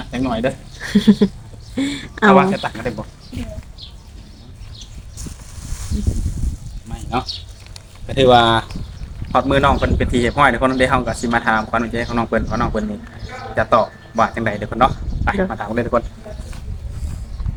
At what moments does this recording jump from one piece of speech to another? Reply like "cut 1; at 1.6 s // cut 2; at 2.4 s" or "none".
none